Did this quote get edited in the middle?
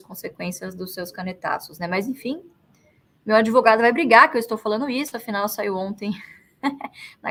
no; 0 cuts

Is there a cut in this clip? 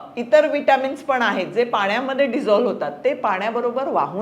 no; 0 cuts

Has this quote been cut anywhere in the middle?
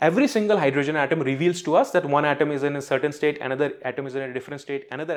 no; 0 cuts

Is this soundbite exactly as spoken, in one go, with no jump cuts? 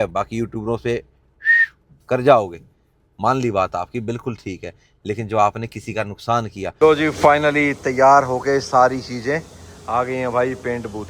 no; 1 cut; at 6.7 s

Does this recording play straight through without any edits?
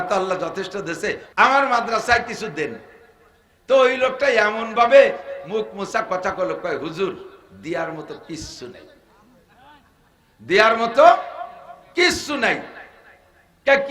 no; 1 cut; at 1.2 s

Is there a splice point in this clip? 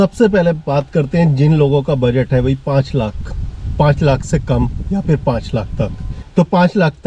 no; 0 cuts

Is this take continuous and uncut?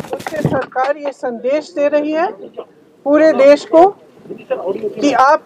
yes; 0 cuts

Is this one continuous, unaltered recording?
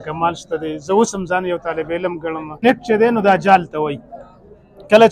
no; 1 cut; at 2.6 s

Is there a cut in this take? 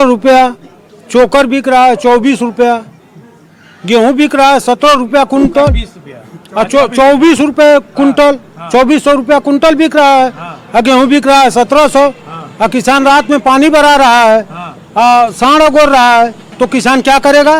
no; 0 cuts

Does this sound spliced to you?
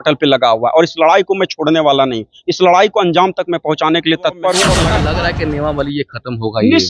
yes; 1 cut; at 4.9 s

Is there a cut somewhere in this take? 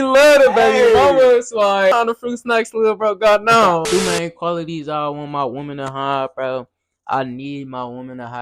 yes; 2 cuts; at 1.9 s, 3.8 s

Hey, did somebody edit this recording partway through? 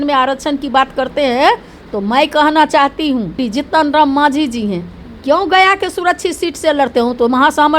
yes; 1 cut; at 3.4 s

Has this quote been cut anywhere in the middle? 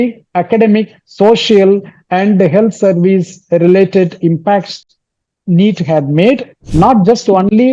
yes; 1 cut; at 6.6 s

